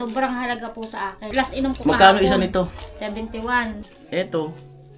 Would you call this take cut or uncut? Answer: cut